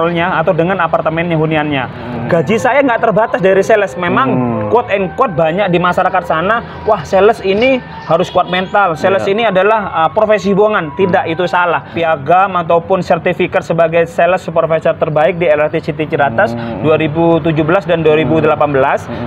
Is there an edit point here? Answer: yes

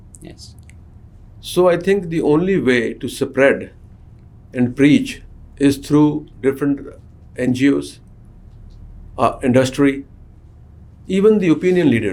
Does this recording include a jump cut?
no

